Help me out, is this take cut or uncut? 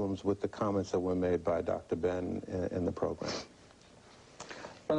uncut